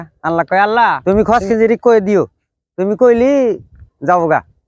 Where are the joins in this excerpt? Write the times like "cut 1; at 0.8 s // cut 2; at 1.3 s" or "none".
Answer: cut 1; at 1.0 s